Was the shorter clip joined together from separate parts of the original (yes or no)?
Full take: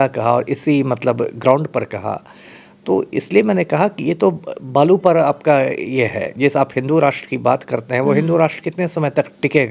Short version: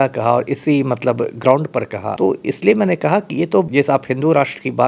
yes